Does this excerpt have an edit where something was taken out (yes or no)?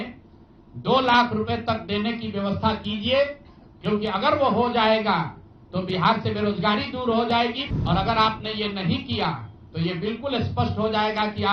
yes